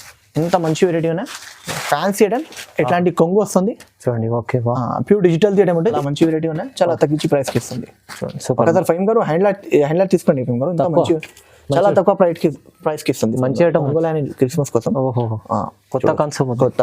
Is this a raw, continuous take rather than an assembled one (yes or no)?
no